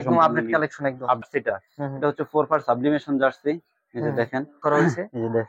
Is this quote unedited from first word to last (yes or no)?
no